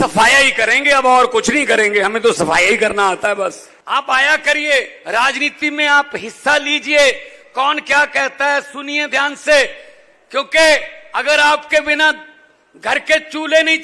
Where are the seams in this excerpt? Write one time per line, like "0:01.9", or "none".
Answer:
0:03.6